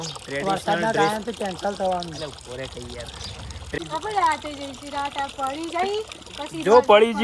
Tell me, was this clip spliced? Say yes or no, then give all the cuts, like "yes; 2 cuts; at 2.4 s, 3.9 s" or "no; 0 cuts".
yes; 1 cut; at 3.8 s